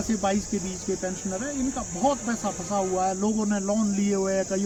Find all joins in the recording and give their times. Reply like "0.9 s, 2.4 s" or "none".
none